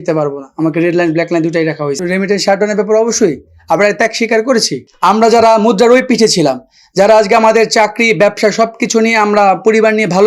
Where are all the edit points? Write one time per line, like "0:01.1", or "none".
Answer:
0:02.0
0:04.9

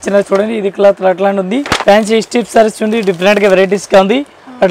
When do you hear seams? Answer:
0:01.7

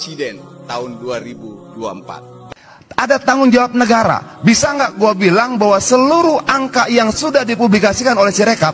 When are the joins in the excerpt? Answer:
0:02.4

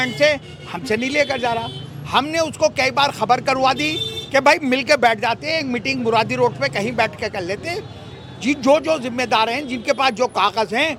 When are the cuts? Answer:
none

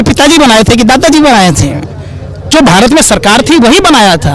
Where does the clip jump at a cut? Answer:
none

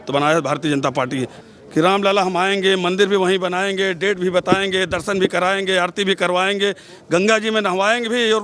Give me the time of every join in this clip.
0:01.3

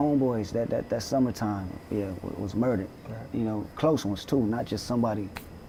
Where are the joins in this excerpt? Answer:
none

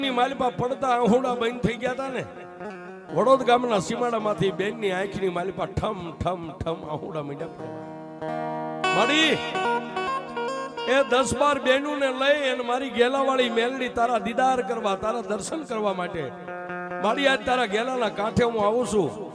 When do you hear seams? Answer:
none

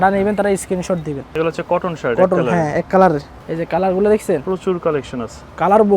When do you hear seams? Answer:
0:01.3
0:03.4

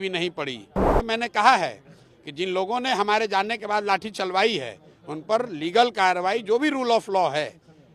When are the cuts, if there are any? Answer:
0:01.0

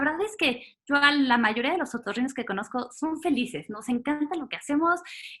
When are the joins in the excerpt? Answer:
none

